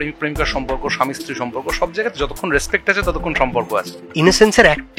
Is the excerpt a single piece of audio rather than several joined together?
no; 1 cut; at 4.1 s

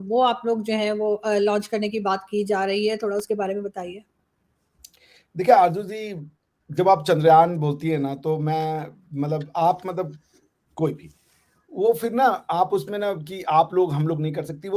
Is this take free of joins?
yes; 0 cuts

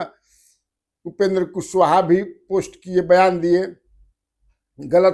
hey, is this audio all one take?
yes; 0 cuts

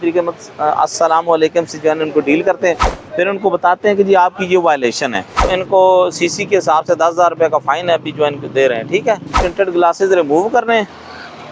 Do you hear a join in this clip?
yes; 2 cuts; at 5.5 s, 9.4 s

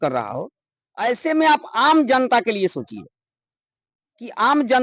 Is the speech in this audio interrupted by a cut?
no; 0 cuts

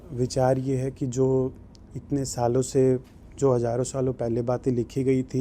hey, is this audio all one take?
yes; 0 cuts

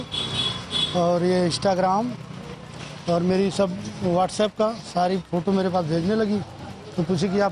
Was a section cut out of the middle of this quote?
no; 0 cuts

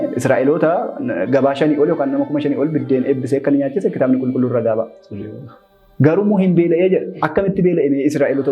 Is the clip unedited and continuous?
yes; 0 cuts

